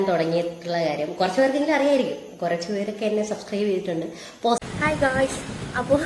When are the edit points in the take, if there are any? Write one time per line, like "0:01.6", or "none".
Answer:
0:04.6